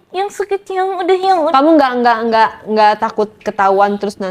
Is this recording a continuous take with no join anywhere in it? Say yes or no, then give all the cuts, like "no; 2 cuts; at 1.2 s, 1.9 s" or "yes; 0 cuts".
no; 1 cut; at 1.5 s